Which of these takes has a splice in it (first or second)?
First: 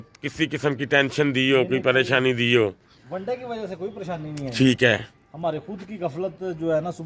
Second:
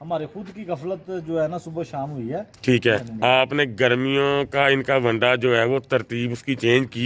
second